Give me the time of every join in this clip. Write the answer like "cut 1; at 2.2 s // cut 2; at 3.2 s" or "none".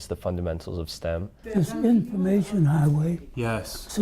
cut 1; at 1.3 s